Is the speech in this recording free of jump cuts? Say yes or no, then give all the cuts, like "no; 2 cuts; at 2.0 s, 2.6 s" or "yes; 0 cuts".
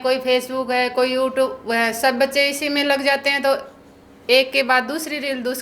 yes; 0 cuts